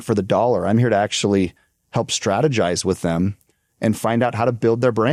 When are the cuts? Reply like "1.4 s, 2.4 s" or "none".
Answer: none

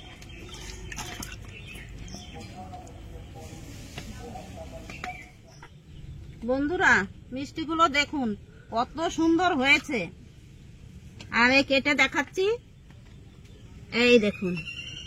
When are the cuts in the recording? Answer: none

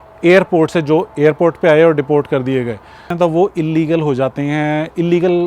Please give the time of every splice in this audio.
3.1 s

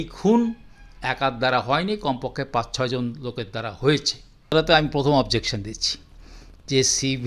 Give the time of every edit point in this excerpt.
4.5 s

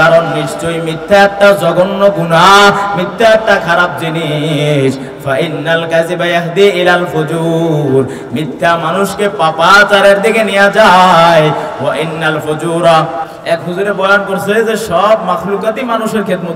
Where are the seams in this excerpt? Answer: 13.3 s

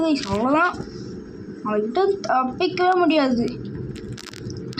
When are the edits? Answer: none

